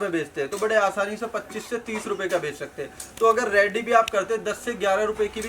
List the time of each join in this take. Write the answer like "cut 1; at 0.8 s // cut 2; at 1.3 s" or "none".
none

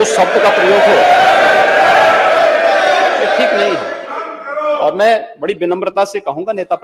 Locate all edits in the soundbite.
none

